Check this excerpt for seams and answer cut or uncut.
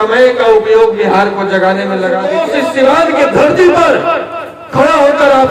cut